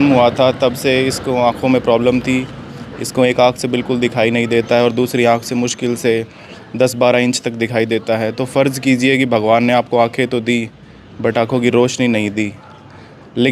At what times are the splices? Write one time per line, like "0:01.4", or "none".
none